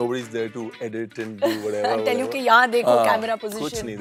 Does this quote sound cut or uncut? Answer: uncut